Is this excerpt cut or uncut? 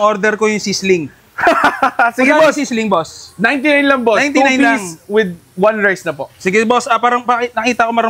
uncut